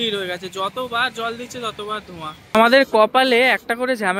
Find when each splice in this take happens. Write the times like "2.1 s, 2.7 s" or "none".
2.5 s